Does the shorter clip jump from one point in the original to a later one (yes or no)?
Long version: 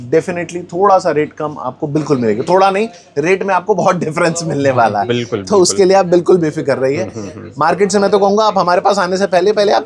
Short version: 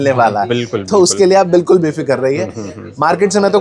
no